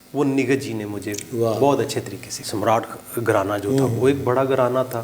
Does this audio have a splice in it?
yes; 1 cut; at 2.3 s

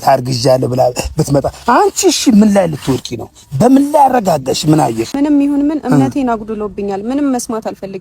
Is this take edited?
yes; 1 cut; at 5.1 s

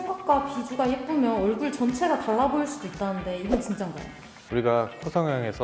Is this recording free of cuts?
yes; 0 cuts

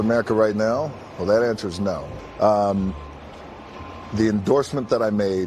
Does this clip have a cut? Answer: yes; 1 cut; at 2.1 s

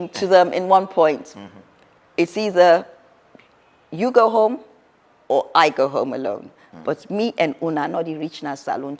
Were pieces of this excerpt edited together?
no; 0 cuts

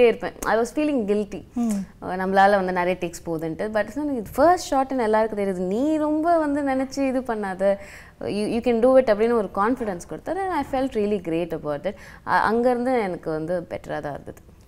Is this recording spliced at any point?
no; 0 cuts

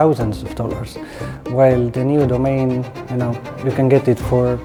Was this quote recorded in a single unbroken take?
yes; 0 cuts

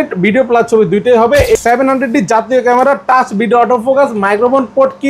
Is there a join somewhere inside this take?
yes; 1 cut; at 1.6 s

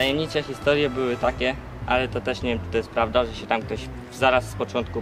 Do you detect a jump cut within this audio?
no; 0 cuts

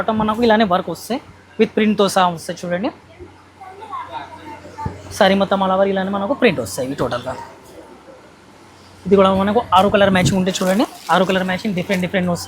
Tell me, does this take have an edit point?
no; 0 cuts

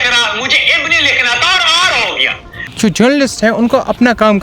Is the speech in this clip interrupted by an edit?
yes; 1 cut; at 2.7 s

